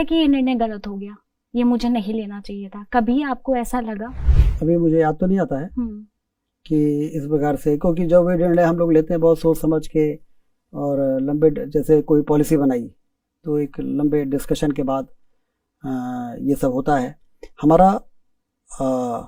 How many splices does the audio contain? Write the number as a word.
zero